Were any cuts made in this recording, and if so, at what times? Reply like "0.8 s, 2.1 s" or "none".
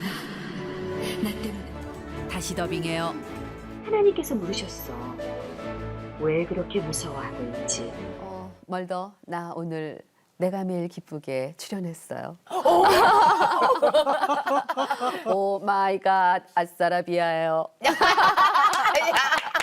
8.2 s